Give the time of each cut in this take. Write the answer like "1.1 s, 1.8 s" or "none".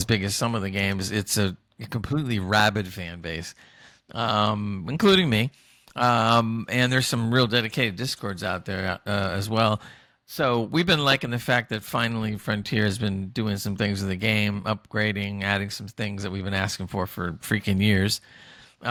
none